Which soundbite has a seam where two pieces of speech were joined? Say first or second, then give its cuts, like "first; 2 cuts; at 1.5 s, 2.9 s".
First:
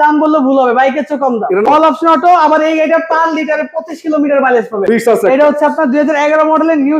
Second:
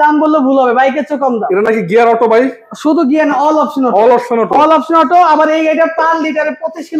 first; 2 cuts; at 1.6 s, 4.8 s